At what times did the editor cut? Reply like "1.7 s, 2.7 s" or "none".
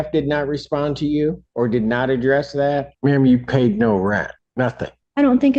1.4 s, 2.9 s, 4.7 s